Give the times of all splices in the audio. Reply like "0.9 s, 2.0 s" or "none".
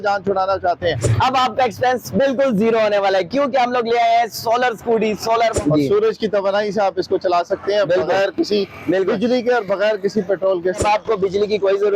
1.1 s, 5.6 s, 10.8 s